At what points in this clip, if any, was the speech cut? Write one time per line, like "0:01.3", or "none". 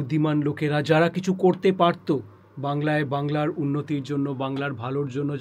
none